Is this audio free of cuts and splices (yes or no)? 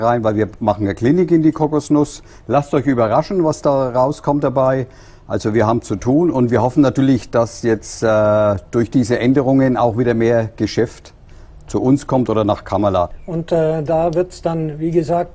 no